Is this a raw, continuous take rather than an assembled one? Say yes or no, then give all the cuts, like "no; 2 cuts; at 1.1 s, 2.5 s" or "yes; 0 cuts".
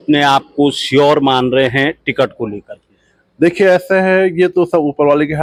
yes; 0 cuts